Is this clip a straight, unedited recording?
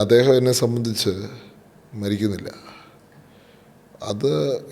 yes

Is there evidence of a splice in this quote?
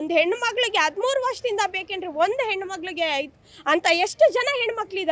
no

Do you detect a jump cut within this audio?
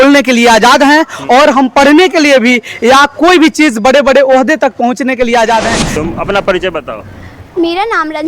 yes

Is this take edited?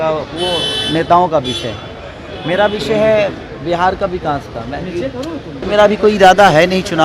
yes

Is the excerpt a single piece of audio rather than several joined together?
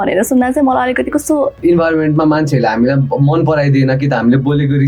no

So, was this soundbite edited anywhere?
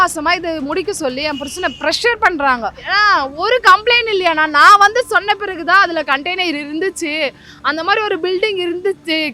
yes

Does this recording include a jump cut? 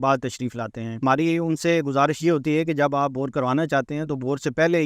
yes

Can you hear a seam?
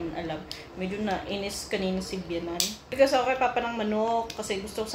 yes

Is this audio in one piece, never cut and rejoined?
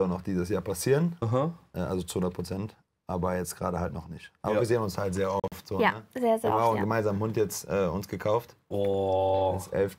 yes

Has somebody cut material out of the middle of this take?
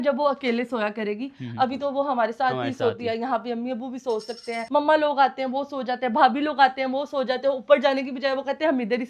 no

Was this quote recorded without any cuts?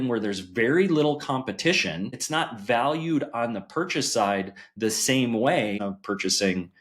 no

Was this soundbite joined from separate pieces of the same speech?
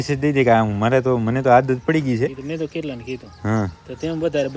no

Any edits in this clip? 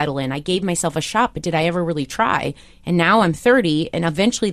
no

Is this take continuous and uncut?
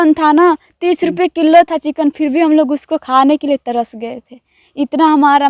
yes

